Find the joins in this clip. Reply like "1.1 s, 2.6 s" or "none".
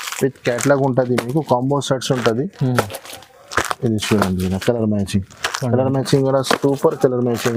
none